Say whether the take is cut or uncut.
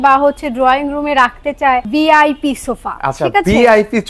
cut